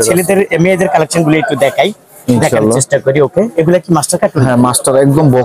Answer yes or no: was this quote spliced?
no